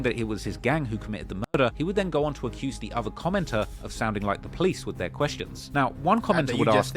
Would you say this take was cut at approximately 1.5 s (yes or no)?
no